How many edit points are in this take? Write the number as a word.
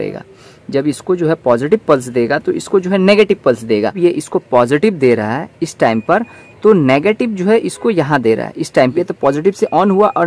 two